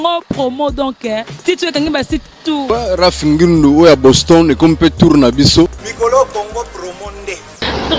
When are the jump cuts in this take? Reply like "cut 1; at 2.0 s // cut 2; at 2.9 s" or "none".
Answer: cut 1; at 2.6 s // cut 2; at 5.8 s

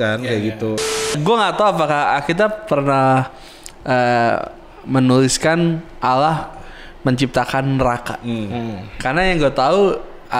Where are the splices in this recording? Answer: cut 1; at 1.1 s

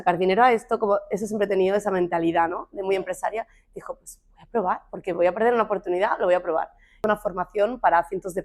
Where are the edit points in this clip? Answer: cut 1; at 7.0 s

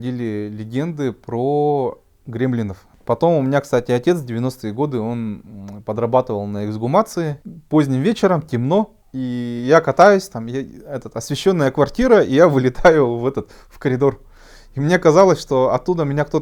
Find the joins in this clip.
cut 1; at 2.9 s // cut 2; at 7.5 s // cut 3; at 9.0 s

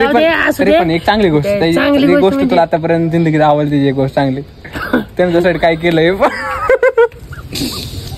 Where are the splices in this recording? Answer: none

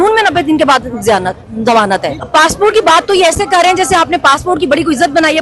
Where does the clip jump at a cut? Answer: cut 1; at 2.2 s

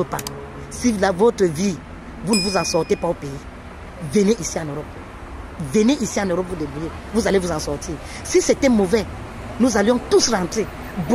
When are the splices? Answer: none

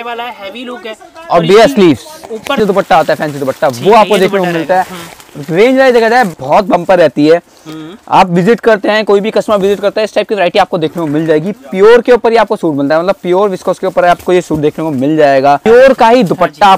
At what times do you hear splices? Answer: cut 1; at 2.6 s // cut 2; at 6.3 s // cut 3; at 15.6 s

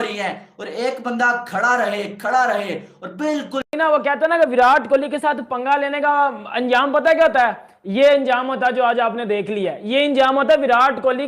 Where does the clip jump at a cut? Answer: cut 1; at 3.6 s

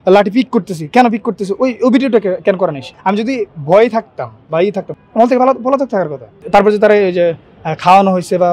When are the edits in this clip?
cut 1; at 2.9 s // cut 2; at 4.9 s // cut 3; at 6.3 s

